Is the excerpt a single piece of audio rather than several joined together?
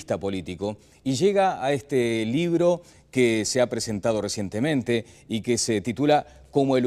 yes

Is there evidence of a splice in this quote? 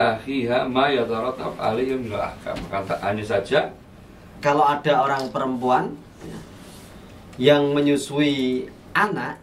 yes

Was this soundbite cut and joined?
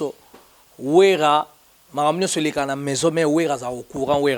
no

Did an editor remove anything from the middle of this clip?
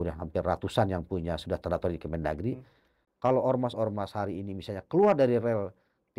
yes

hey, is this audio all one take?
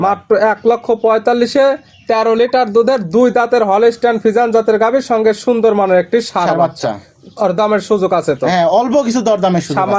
yes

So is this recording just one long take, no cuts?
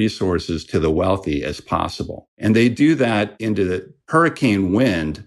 no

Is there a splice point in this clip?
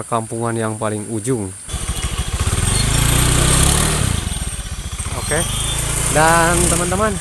yes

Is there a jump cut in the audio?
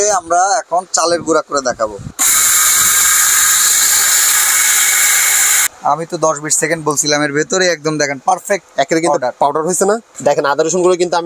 yes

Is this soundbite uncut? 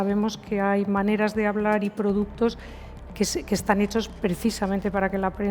yes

